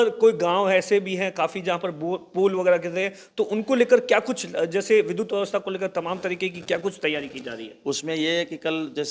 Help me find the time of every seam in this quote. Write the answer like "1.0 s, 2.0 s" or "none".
none